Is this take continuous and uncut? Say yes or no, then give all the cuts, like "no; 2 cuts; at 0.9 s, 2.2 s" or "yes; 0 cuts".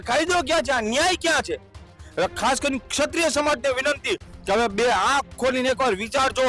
yes; 0 cuts